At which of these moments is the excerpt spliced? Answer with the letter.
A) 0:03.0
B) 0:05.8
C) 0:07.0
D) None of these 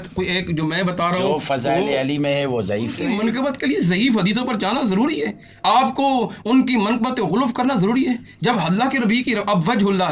A